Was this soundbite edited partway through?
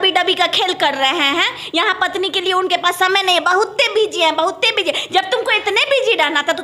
no; 0 cuts

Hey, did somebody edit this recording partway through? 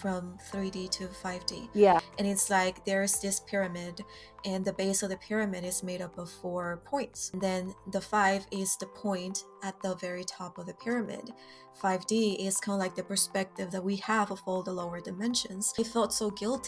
yes; 3 cuts; at 2.1 s, 7.3 s, 15.8 s

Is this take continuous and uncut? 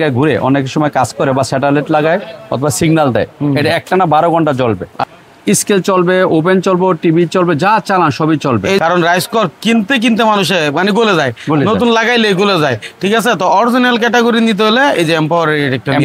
no; 2 cuts; at 4.9 s, 8.8 s

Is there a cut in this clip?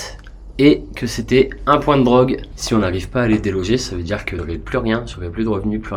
yes; 2 cuts; at 2.5 s, 4.3 s

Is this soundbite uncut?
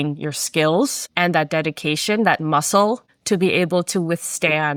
yes; 0 cuts

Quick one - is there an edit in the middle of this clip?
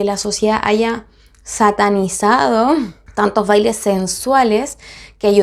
no; 0 cuts

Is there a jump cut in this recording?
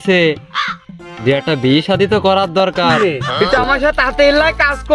yes; 1 cut; at 2.9 s

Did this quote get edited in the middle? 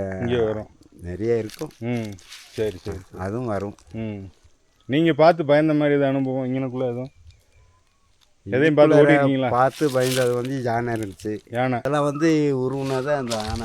yes; 1 cut; at 11.9 s

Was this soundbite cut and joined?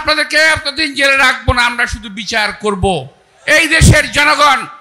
no; 0 cuts

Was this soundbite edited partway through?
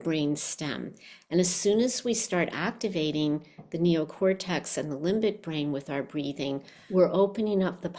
yes; 1 cut; at 6.7 s

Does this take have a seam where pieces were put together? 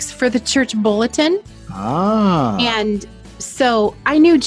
no; 0 cuts

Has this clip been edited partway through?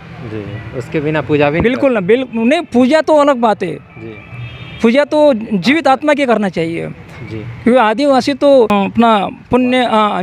yes; 1 cut; at 8.7 s

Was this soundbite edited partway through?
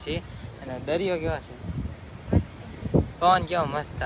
no; 0 cuts

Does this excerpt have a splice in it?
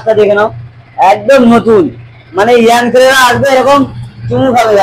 no; 0 cuts

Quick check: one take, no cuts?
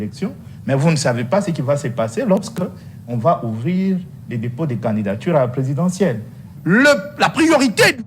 no; 1 cut; at 6.5 s

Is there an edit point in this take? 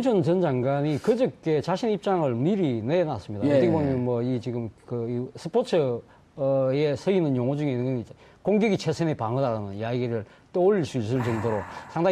yes; 1 cut; at 5.9 s

